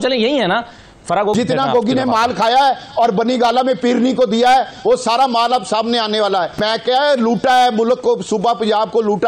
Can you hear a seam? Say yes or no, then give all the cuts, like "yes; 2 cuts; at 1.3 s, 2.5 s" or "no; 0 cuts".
yes; 2 cuts; at 1.3 s, 6.6 s